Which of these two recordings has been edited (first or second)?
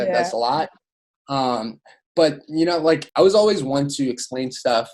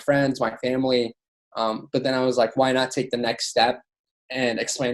first